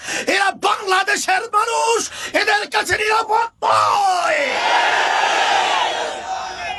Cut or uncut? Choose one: uncut